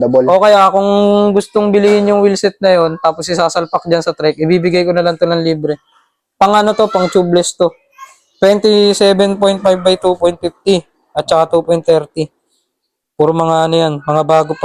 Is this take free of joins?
yes; 0 cuts

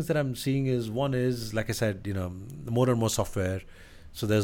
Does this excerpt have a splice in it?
no; 0 cuts

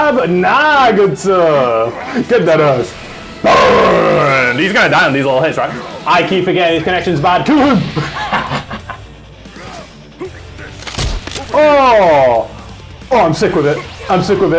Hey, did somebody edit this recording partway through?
yes; 1 cut; at 9.2 s

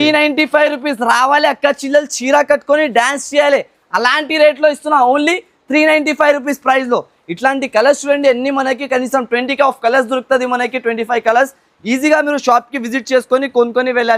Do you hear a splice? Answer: no; 0 cuts

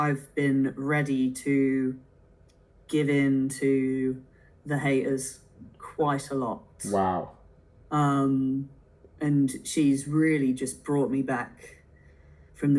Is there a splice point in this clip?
no; 0 cuts

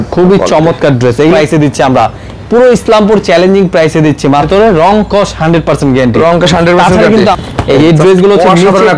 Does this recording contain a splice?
yes; 3 cuts; at 1.3 s, 4.5 s, 7.3 s

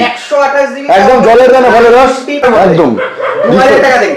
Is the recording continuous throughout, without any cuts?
no; 1 cut; at 2.4 s

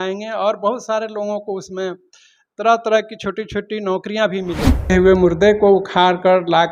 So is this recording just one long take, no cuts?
no; 1 cut; at 4.9 s

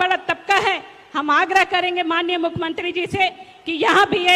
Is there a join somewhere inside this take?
no; 0 cuts

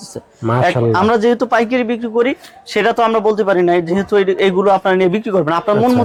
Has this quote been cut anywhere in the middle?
no; 0 cuts

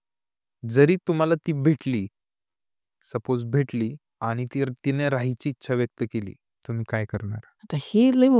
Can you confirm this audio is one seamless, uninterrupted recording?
no; 3 cuts; at 4.1 s, 6.5 s, 7.5 s

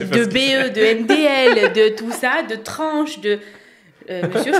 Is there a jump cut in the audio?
no; 0 cuts

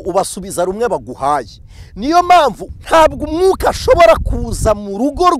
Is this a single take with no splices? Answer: no; 1 cut; at 2.7 s

